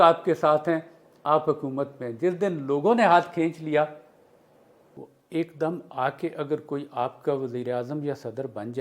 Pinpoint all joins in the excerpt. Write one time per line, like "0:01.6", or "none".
0:05.1